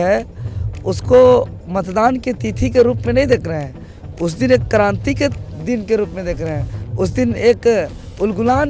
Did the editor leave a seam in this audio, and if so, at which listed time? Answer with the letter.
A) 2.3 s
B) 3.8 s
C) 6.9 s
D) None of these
D